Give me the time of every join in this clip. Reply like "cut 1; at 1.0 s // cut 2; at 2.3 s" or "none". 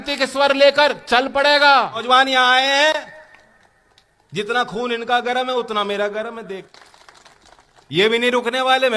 cut 1; at 2.0 s // cut 2; at 6.7 s